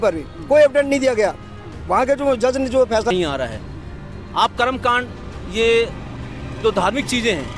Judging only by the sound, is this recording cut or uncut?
cut